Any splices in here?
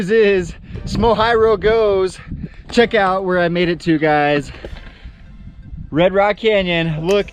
no; 0 cuts

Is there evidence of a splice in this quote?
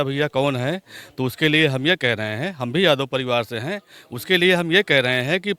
no; 0 cuts

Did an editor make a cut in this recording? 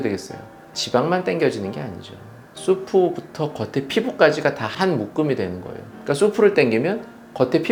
no; 0 cuts

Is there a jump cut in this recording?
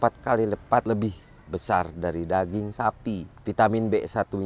yes; 2 cuts; at 0.8 s, 3.3 s

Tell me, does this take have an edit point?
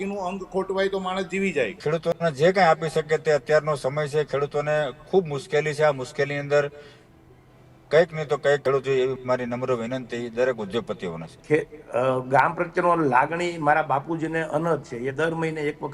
yes; 2 cuts; at 1.8 s, 11.3 s

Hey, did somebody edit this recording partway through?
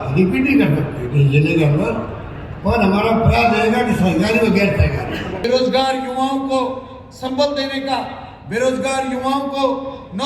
yes; 1 cut; at 5.4 s

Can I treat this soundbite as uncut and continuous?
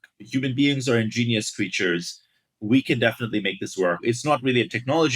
no; 1 cut; at 4.0 s

